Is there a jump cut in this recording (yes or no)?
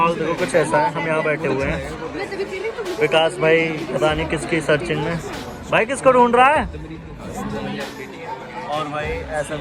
no